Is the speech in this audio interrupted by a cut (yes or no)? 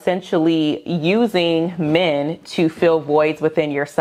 no